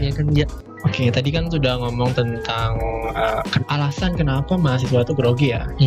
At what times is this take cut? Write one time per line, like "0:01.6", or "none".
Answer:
none